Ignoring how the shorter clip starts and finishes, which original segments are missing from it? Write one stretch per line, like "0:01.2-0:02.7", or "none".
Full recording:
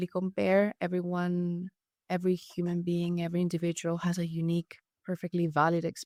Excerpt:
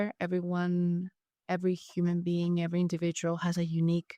none